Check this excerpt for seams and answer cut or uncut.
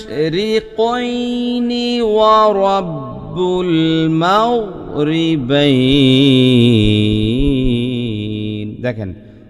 uncut